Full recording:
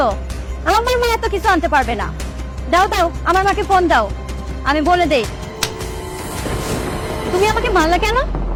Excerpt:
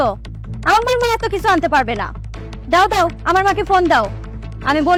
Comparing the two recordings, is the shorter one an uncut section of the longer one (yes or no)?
yes